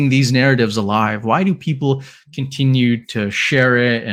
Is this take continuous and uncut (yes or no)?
yes